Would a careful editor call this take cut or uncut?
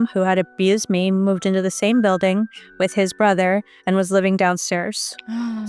uncut